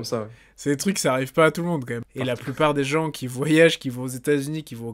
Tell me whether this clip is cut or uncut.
cut